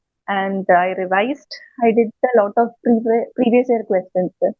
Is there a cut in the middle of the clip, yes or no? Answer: no